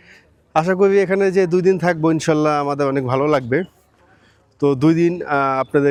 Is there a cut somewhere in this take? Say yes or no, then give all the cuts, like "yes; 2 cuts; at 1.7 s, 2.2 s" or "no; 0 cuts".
no; 0 cuts